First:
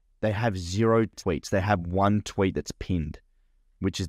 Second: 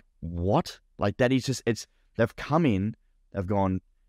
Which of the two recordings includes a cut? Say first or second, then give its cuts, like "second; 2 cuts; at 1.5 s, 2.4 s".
first; 1 cut; at 1.2 s